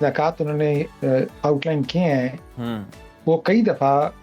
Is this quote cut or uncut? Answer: uncut